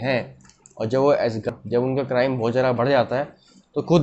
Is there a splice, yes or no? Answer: yes